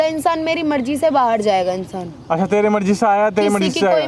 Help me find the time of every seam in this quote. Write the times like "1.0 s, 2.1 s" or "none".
none